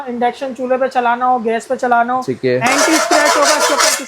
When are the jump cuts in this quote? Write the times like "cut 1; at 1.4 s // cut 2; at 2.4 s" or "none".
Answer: none

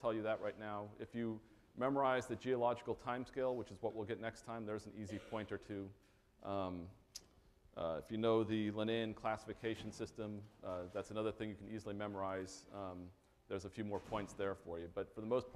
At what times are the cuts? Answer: cut 1; at 9.9 s

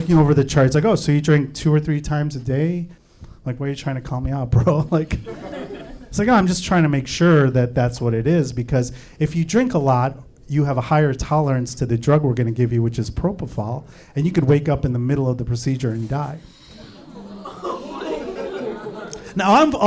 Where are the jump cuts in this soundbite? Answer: cut 1; at 2.9 s

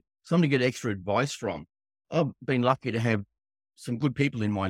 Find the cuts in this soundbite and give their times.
cut 1; at 2.0 s

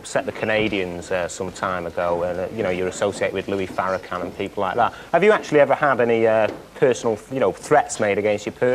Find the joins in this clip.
cut 1; at 7.1 s

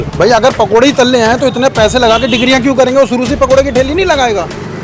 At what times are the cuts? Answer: none

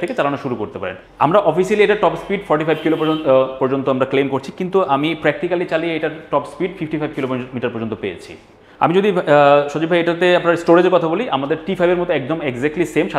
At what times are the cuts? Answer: none

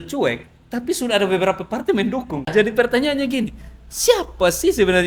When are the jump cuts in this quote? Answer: cut 1; at 2.5 s

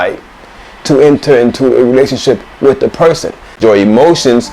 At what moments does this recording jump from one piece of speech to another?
cut 1; at 3.6 s

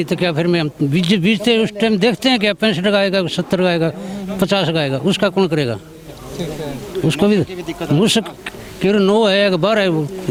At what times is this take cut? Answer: none

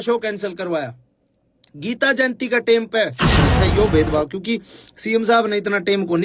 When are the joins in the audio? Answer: cut 1; at 3.3 s

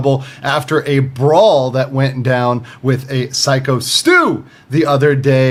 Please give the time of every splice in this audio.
none

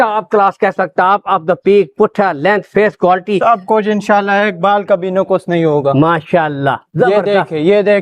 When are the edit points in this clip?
none

